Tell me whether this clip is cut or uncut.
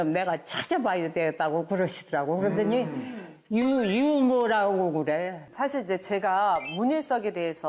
cut